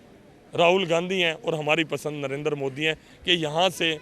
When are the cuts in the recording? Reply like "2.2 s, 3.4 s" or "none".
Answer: 3.0 s